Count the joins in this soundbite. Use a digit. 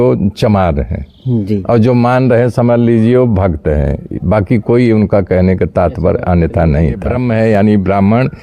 1